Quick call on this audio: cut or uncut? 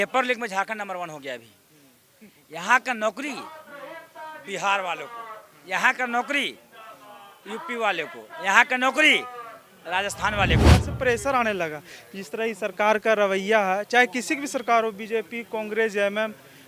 cut